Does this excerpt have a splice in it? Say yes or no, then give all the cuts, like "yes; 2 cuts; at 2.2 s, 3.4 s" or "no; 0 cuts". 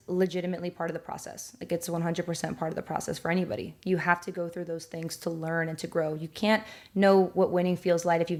no; 0 cuts